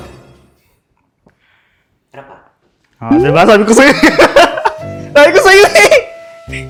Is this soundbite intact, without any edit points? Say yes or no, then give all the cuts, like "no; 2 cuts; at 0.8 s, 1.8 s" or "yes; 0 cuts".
yes; 0 cuts